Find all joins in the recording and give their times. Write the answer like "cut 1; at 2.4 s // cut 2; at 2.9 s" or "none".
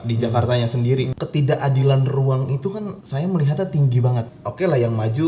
cut 1; at 1.1 s // cut 2; at 3.0 s // cut 3; at 4.3 s